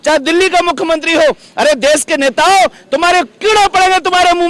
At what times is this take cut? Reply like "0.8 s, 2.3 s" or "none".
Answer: none